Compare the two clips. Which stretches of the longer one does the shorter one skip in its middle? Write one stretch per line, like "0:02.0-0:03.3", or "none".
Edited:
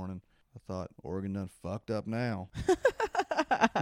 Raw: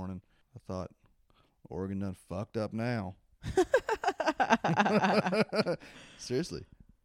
0:01.0-0:01.6
0:03.2-0:03.4

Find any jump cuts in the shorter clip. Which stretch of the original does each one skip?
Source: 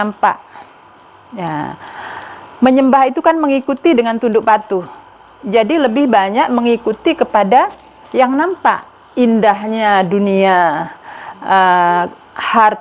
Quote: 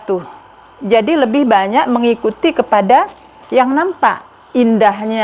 none

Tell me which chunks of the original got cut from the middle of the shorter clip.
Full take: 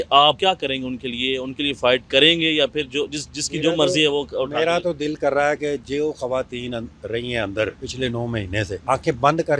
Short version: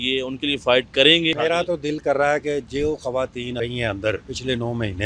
0:02.5-0:04.5
0:06.7-0:07.1

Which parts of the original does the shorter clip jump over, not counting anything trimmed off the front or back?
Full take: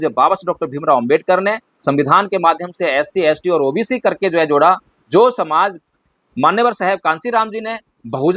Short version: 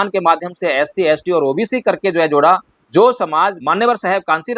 0:05.8-0:06.4

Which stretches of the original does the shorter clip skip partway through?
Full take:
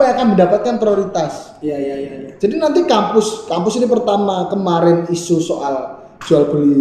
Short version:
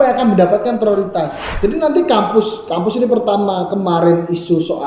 0:01.4-0:02.2

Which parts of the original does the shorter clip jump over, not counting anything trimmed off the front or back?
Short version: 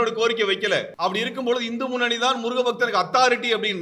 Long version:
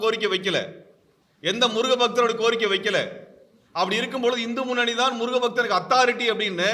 0:03.1-0:03.7

